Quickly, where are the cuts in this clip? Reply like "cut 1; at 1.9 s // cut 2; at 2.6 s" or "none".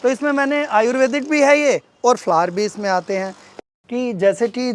cut 1; at 3.6 s